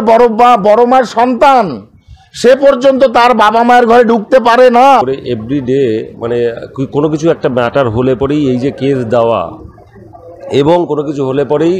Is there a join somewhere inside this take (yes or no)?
yes